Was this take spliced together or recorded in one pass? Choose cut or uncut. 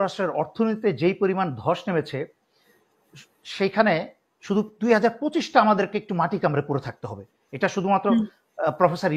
uncut